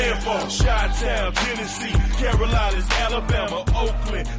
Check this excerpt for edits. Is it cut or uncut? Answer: uncut